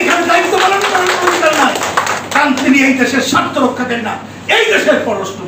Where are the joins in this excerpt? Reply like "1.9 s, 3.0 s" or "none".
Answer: none